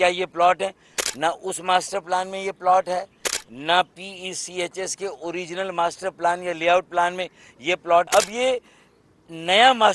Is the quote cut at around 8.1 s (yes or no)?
yes